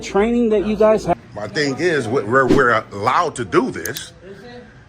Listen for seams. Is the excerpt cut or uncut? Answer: cut